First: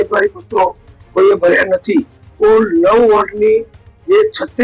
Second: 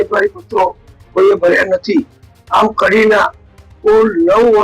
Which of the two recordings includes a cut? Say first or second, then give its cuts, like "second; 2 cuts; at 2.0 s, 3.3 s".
first; 1 cut; at 2.2 s